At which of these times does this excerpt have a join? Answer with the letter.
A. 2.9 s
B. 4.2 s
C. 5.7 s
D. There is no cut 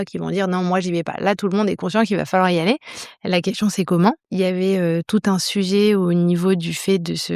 B